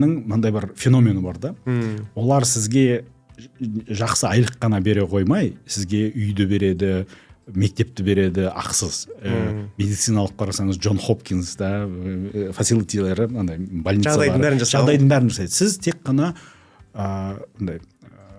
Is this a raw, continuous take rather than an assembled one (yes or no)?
yes